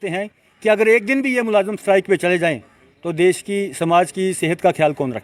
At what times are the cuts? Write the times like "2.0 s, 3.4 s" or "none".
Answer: none